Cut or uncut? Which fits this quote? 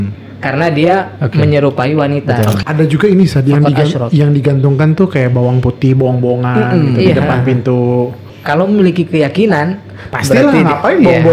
cut